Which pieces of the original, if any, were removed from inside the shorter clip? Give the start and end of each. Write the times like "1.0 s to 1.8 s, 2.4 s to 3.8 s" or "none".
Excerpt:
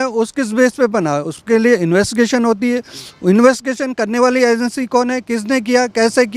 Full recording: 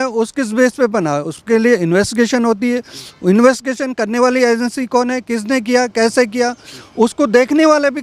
none